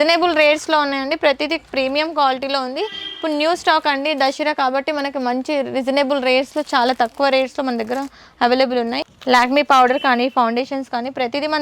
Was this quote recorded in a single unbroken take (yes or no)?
no